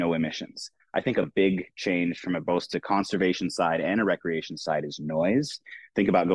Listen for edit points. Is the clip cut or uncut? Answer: uncut